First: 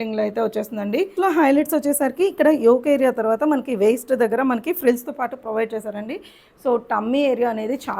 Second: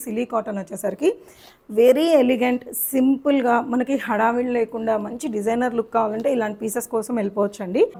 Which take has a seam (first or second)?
first